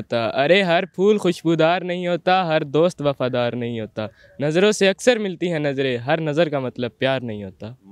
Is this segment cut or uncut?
uncut